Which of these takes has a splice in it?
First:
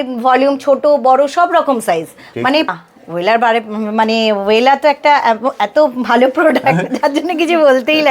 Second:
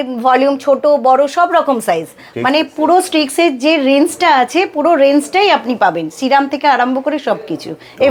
first; 1 cut; at 2.7 s

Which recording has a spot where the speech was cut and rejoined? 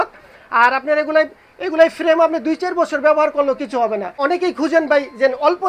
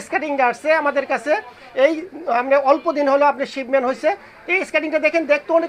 first; 1 cut; at 4.1 s

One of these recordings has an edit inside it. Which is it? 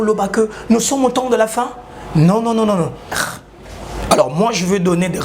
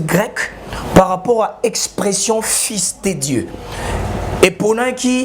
first; 1 cut; at 3.2 s

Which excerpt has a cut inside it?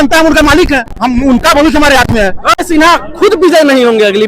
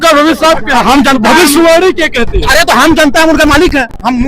first; 1 cut; at 2.6 s

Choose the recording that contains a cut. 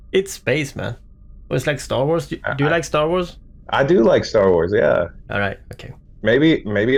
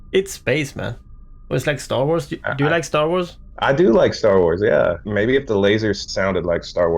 second; 3 cuts; at 3.4 s, 5.1 s, 6.0 s

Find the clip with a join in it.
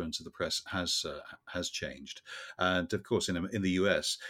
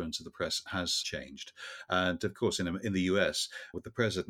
second; 1 cut; at 1.0 s

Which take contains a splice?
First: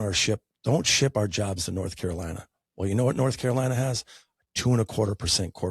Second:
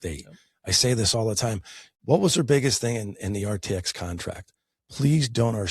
second; 1 cut; at 1.9 s

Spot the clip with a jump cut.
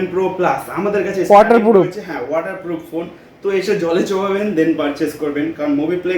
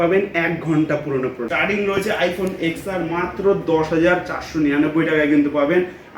second; 1 cut; at 1.5 s

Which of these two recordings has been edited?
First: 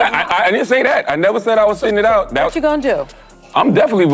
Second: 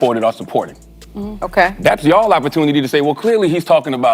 first; 1 cut; at 1.0 s

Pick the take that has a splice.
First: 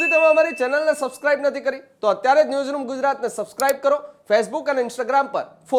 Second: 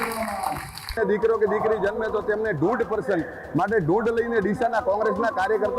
second; 1 cut; at 0.9 s

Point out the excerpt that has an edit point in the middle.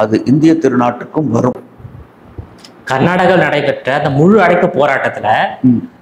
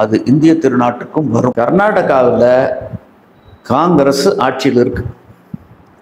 second; 1 cut; at 1.5 s

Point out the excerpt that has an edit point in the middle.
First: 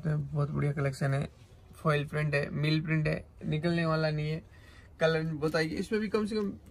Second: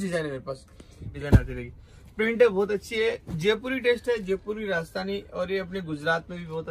second; 1 cut; at 1.1 s

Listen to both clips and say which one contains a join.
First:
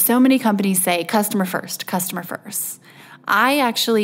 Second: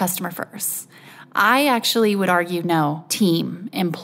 second; 1 cut; at 3.1 s

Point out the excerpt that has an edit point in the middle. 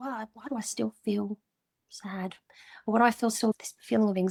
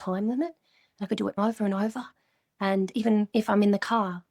second; 1 cut; at 3.3 s

